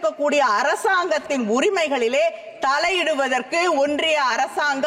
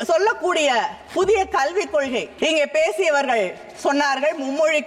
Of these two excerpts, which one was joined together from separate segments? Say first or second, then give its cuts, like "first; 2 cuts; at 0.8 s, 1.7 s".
second; 2 cuts; at 1.0 s, 2.3 s